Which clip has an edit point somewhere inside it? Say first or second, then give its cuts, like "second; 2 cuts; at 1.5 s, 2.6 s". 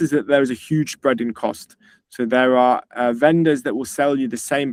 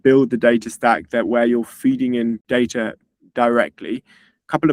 second; 1 cut; at 2.4 s